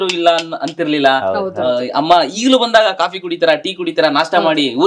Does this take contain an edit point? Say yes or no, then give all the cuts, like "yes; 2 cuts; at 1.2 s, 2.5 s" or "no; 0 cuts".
no; 0 cuts